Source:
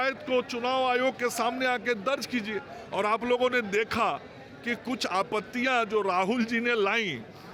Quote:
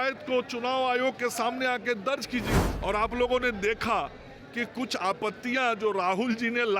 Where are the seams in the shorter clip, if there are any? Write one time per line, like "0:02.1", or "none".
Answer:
0:02.7

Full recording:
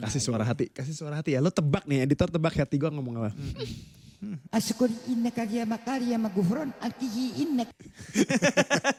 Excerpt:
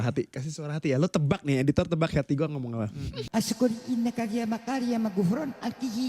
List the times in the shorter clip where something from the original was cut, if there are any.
0:03.2

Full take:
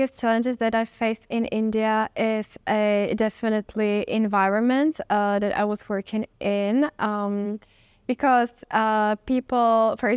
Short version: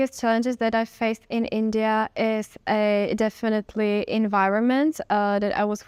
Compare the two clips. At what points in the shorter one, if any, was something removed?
none

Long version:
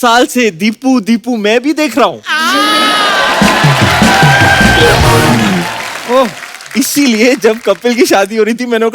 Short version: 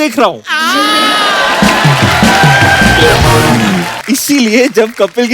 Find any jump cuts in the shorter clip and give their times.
0:03.9

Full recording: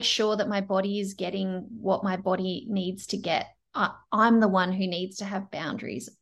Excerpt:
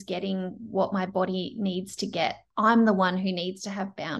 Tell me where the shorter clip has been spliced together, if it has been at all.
0:02.5

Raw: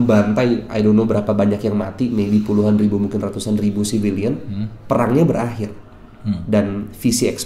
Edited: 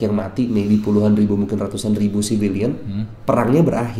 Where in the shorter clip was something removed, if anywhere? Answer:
none

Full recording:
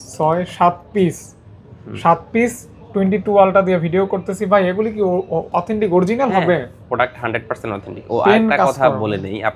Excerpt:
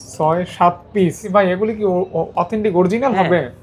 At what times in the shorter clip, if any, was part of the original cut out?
0:01.2

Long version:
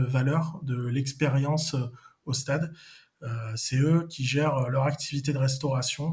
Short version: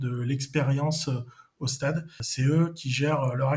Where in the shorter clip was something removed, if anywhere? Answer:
0:02.2

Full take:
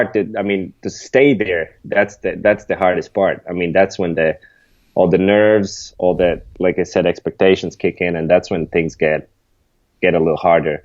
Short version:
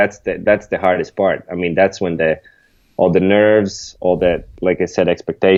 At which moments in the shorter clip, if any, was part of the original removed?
none

